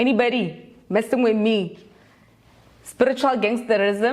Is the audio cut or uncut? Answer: uncut